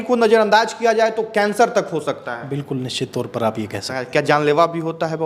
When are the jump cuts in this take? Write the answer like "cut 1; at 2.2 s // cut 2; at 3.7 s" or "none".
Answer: cut 1; at 4.0 s